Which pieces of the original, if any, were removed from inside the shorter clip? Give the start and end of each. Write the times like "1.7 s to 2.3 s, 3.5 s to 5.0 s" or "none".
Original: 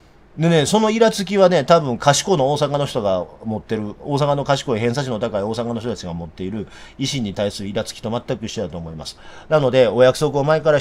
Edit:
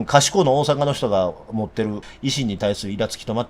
4.0 s to 6.8 s